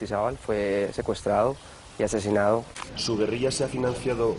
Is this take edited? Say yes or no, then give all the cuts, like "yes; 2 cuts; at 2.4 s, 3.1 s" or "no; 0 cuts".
yes; 1 cut; at 2.7 s